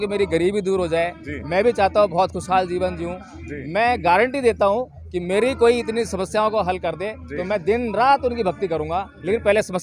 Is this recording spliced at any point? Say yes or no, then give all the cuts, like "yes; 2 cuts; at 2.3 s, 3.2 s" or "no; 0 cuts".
no; 0 cuts